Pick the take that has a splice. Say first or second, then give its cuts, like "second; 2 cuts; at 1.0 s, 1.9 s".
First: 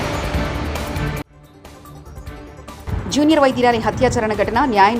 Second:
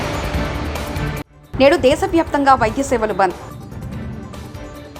first; 1 cut; at 1.4 s